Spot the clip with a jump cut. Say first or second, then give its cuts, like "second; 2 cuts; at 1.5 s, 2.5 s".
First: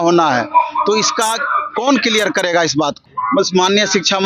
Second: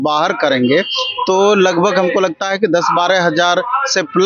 first; 1 cut; at 3.0 s